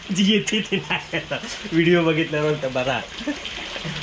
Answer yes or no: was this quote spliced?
no